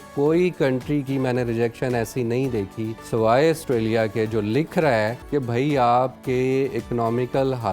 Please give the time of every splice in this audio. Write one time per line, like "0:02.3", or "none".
0:03.0
0:05.2